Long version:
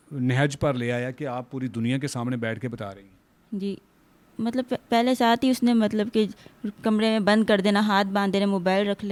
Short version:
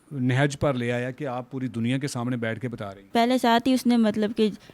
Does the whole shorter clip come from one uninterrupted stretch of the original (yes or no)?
no